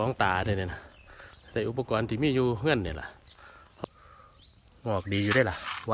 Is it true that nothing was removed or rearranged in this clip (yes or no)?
no